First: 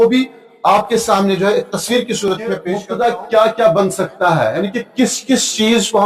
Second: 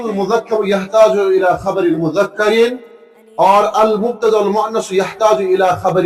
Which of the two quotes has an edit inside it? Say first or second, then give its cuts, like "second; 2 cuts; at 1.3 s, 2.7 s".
first; 1 cut; at 2.7 s